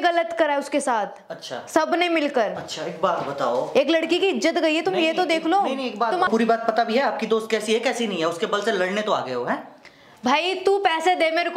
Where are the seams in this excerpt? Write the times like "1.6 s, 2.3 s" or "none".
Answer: none